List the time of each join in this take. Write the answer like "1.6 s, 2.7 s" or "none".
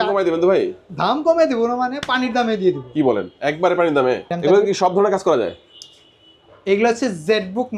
4.3 s